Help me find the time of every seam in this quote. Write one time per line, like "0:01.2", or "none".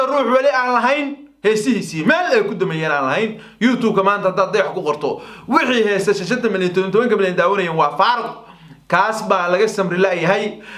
none